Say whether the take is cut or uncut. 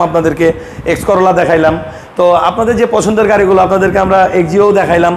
uncut